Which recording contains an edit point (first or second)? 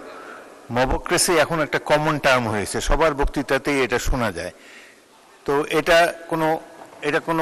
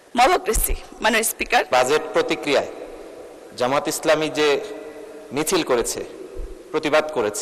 second